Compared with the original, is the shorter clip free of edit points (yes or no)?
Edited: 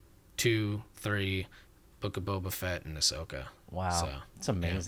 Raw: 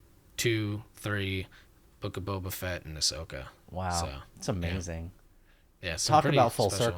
yes